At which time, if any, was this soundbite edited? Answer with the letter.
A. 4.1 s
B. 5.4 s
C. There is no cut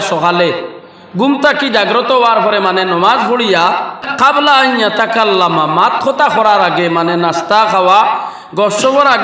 A